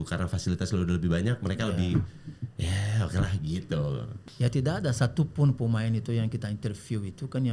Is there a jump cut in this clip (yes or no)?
yes